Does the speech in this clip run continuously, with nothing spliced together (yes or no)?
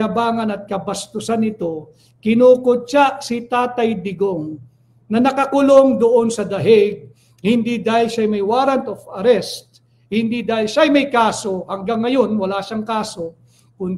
yes